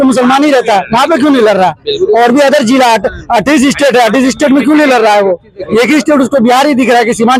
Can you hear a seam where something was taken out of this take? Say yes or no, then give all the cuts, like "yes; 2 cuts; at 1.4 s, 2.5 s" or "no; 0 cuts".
no; 0 cuts